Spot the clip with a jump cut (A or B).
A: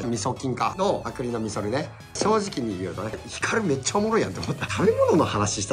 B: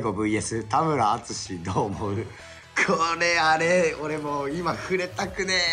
A